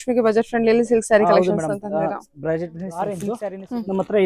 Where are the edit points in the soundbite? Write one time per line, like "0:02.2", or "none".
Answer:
0:03.3

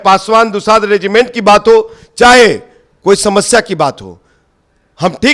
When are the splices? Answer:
none

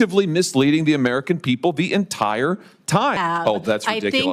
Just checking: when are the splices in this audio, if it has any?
0:03.2

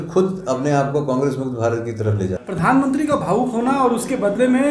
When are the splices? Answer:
0:02.4

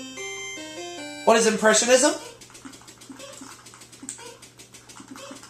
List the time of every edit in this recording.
none

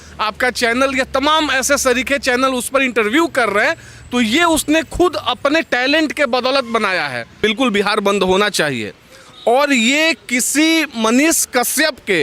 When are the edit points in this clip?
0:07.3

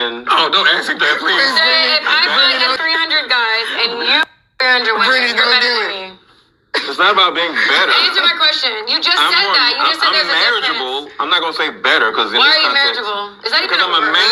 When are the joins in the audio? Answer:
0:02.8

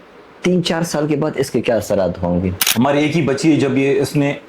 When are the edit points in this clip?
0:02.6

